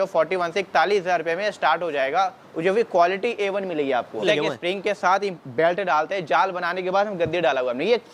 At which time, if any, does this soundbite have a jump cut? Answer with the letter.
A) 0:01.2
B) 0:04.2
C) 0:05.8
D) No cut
B